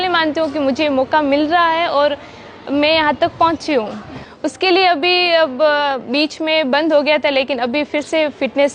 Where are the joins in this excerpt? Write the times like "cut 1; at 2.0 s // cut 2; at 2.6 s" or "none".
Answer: cut 1; at 4.2 s